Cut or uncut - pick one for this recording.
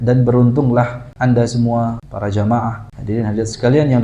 cut